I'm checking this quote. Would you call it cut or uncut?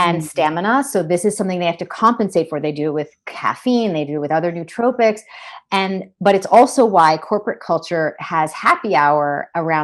uncut